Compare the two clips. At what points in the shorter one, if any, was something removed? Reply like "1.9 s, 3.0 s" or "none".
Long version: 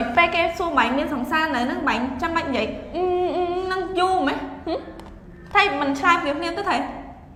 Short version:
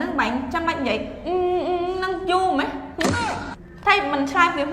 none